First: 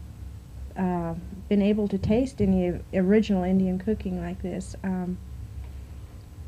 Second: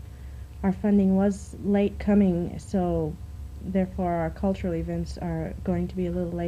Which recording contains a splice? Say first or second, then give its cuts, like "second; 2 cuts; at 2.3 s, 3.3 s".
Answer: second; 1 cut; at 3.6 s